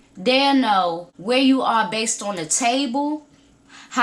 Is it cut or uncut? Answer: uncut